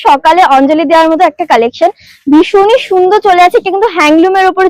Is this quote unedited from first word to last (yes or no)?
yes